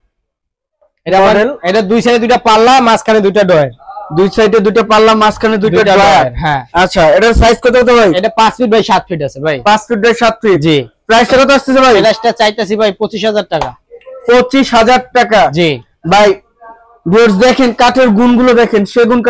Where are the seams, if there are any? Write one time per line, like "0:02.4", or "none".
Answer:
none